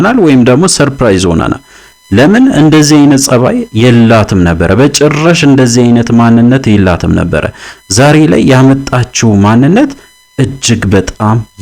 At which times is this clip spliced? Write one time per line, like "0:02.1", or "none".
none